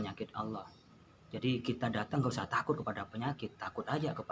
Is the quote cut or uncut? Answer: uncut